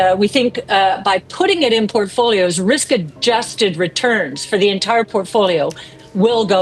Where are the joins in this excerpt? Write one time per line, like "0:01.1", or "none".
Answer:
none

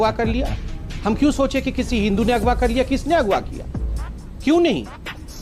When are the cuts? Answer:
none

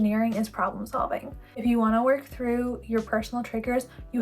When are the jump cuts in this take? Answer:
0:01.4

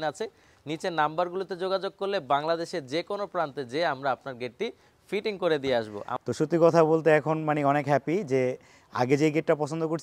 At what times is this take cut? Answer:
0:06.1

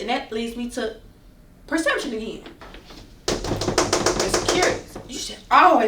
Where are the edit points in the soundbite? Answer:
0:02.6

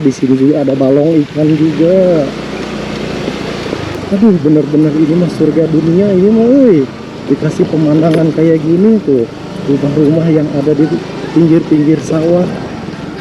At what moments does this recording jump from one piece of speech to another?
0:03.9

